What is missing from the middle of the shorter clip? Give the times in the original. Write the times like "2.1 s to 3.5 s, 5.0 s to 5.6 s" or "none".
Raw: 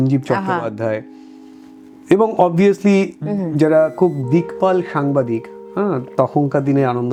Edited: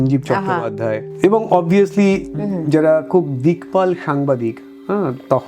1.1 s to 2.0 s